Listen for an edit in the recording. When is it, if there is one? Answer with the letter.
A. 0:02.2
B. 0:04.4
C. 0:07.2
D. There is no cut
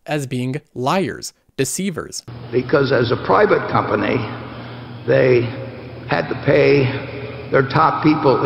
A